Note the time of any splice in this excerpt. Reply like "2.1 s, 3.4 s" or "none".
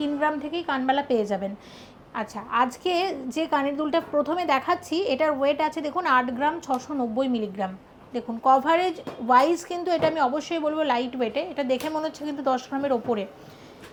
none